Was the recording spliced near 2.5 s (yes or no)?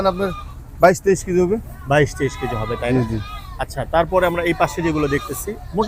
no